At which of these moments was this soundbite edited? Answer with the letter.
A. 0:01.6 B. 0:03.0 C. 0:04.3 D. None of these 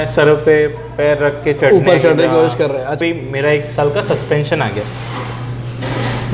B